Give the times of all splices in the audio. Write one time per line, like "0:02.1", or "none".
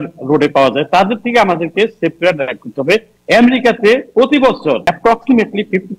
0:03.1
0:04.9

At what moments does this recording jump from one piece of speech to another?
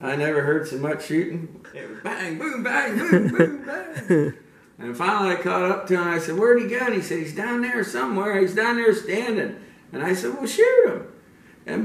0:01.6

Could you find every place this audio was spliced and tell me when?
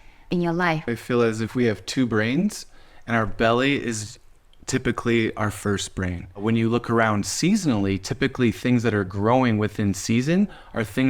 0:00.9
0:06.4

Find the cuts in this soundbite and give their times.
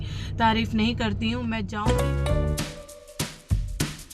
0:01.7

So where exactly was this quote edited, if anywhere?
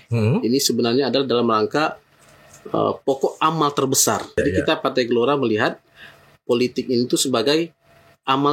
0:04.4

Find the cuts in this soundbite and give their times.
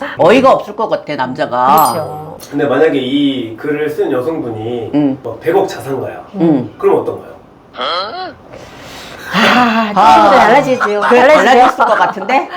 0:02.3

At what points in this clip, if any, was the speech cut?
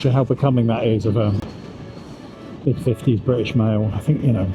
0:01.4

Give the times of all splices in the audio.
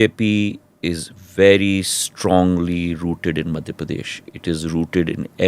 none

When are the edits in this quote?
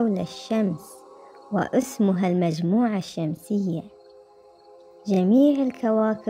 none

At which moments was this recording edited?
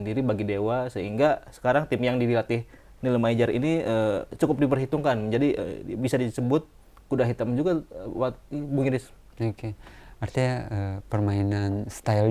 none

